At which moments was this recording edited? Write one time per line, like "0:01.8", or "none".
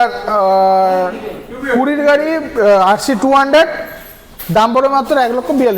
none